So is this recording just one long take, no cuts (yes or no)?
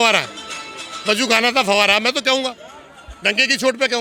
yes